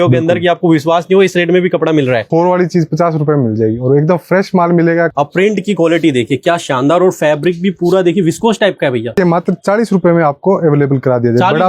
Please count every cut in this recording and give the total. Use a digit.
3